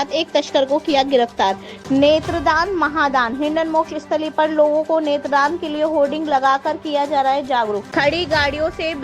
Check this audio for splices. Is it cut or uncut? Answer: cut